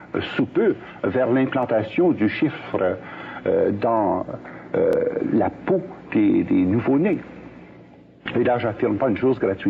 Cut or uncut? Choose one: uncut